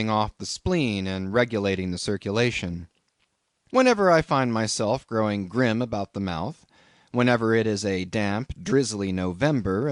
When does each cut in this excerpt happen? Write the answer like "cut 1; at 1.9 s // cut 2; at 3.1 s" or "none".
cut 1; at 2.2 s